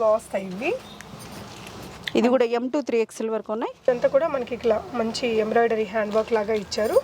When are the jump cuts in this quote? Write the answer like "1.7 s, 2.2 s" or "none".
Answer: 3.9 s